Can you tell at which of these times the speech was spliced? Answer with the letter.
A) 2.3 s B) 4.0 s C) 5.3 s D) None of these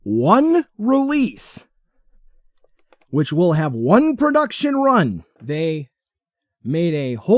C